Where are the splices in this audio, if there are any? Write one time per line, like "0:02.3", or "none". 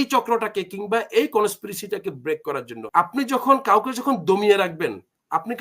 0:02.7